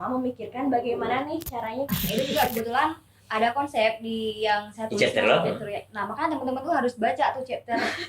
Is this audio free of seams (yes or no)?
no